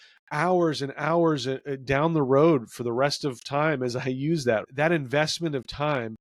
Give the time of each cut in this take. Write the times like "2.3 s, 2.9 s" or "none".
4.7 s